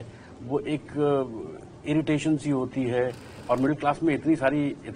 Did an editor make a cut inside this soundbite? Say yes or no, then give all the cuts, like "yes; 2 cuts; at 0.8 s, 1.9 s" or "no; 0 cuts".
yes; 1 cut; at 3.4 s